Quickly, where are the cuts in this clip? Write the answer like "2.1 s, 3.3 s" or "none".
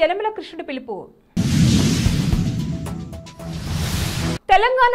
none

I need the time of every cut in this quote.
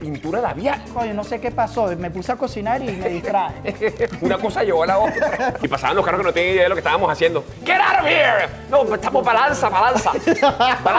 0.9 s, 5.6 s

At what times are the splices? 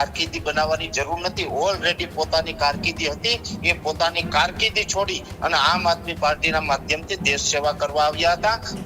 none

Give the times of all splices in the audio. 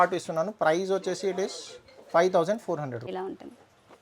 3.1 s

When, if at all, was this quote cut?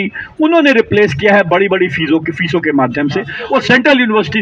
3.4 s

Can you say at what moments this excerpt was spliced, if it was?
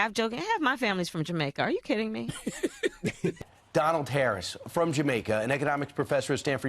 3.4 s

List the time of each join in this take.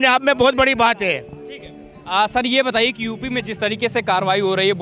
none

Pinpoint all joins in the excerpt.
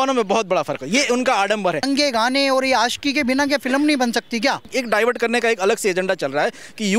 1.8 s, 4.7 s

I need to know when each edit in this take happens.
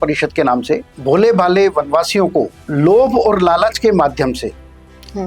0.9 s, 2.6 s

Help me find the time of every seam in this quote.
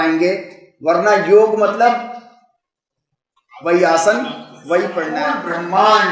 5.2 s

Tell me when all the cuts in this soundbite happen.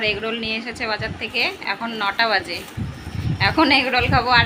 none

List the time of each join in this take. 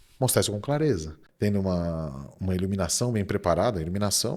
1.2 s

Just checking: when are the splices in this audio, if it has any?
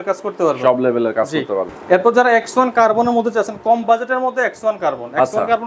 1.7 s

